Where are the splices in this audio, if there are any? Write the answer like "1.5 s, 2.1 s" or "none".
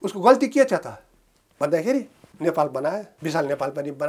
2.2 s, 3.1 s